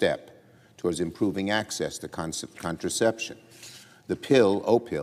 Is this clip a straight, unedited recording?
no; 1 cut; at 1.0 s

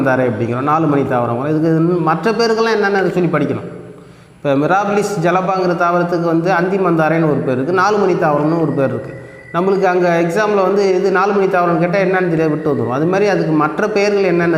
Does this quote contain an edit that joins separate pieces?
no; 0 cuts

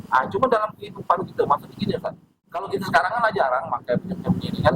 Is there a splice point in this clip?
yes; 1 cut; at 2.7 s

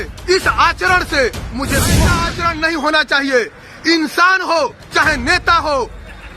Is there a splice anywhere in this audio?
yes; 1 cut; at 1.9 s

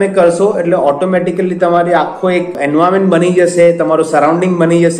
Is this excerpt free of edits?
no; 1 cut; at 2.6 s

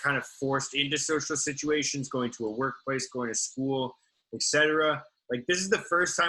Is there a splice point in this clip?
no; 0 cuts

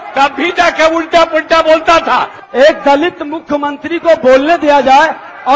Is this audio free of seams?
no; 1 cut; at 2.4 s

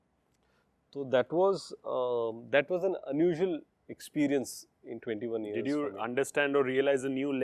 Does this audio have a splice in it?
no; 0 cuts

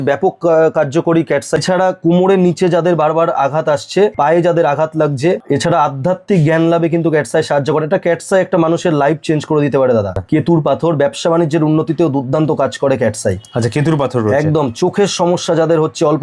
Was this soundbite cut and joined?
yes; 4 cuts; at 1.6 s, 4.1 s, 5.4 s, 10.2 s

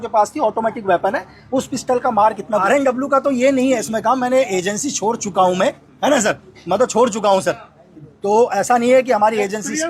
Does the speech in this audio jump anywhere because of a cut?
yes; 1 cut; at 2.6 s

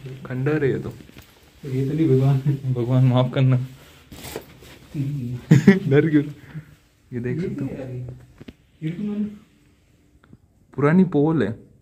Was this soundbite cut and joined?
no; 0 cuts

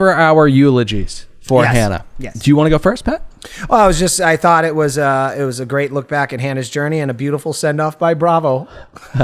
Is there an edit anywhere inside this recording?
no; 0 cuts

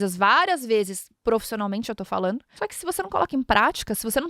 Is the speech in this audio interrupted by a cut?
yes; 1 cut; at 2.5 s

